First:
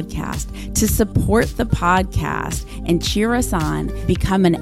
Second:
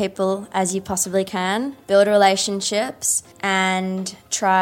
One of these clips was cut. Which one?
second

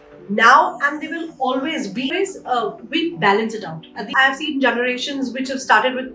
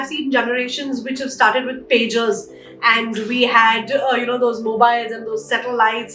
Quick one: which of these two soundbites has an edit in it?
first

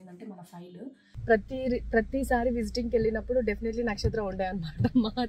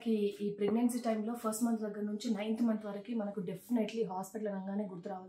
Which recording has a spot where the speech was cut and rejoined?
first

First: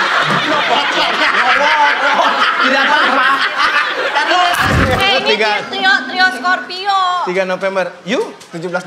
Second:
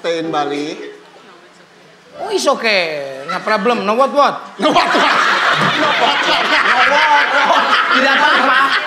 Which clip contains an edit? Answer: first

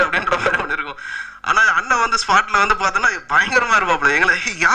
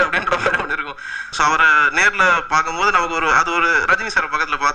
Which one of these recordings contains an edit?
second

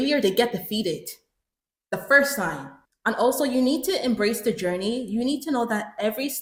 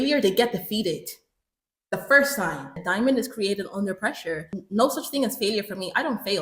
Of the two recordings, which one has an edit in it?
second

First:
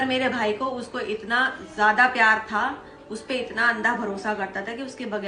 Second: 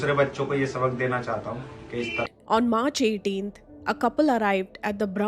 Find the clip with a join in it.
second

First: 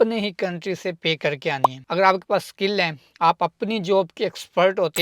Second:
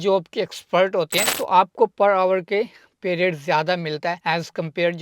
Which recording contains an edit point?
first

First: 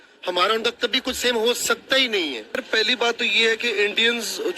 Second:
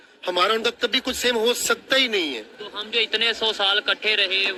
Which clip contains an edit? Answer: first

